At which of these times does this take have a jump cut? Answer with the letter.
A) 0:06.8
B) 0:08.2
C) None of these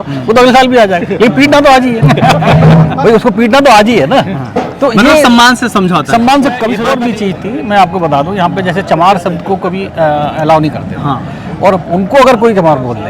A